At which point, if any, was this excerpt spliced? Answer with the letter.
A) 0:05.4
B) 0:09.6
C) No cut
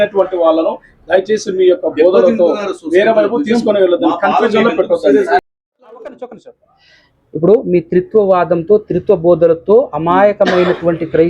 A